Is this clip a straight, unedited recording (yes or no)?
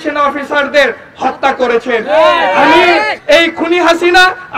no